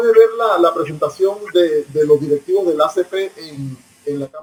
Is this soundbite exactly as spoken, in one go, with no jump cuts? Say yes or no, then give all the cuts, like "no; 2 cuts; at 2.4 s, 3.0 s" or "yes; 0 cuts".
yes; 0 cuts